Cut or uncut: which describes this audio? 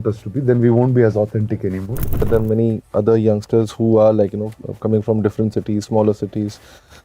cut